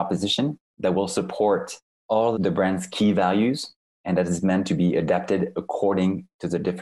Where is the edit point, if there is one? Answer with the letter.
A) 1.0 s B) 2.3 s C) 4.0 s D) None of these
B